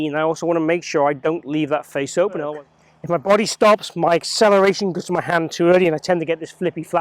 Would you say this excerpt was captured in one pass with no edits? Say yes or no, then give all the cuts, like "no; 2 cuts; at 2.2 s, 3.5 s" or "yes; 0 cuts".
no; 1 cut; at 2.5 s